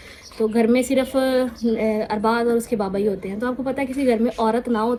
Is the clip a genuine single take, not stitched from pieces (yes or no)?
yes